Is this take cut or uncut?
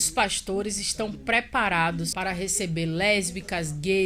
cut